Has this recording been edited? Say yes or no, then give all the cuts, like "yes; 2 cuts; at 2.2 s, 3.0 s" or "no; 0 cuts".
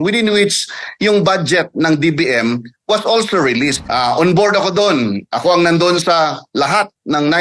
yes; 1 cut; at 3.8 s